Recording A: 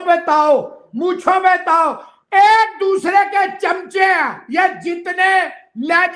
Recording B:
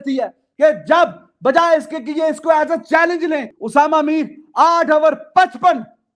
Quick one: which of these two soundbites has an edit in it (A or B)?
B